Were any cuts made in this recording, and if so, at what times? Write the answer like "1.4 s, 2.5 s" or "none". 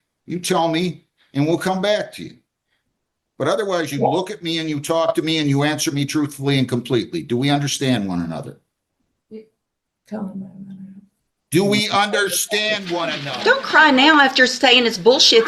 13.2 s